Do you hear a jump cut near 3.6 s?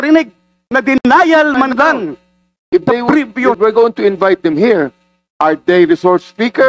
yes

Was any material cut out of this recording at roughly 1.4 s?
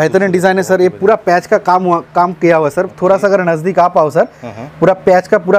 no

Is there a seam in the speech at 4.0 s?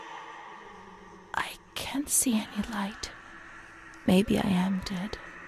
no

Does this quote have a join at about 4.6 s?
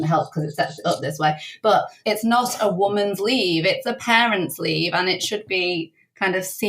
no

